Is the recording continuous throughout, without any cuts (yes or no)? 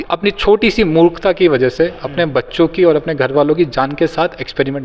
yes